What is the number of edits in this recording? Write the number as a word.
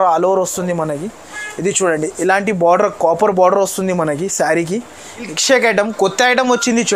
one